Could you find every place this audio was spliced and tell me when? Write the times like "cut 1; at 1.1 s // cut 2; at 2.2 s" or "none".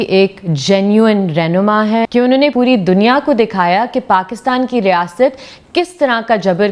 cut 1; at 2.3 s